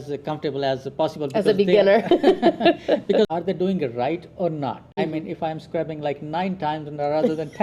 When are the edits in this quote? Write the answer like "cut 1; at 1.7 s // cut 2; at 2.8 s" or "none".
cut 1; at 3.3 s // cut 2; at 5.0 s